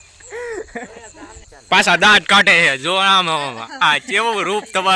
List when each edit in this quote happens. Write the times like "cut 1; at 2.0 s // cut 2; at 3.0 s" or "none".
cut 1; at 1.3 s